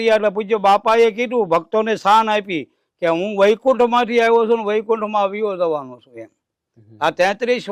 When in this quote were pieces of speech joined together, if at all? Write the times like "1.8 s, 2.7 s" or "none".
none